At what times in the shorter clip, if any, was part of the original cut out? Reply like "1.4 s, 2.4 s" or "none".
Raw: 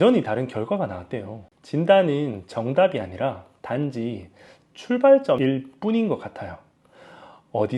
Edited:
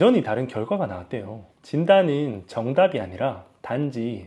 none